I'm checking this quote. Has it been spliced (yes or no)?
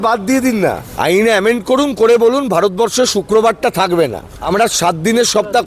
yes